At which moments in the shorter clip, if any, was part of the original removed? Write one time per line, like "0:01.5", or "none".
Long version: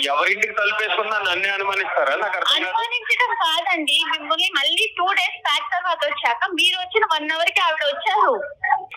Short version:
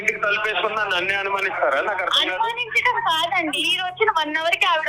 0:03.7